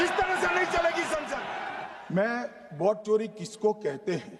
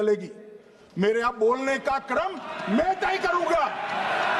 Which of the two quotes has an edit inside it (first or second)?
first